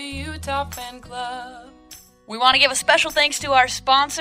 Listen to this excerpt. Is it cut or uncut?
cut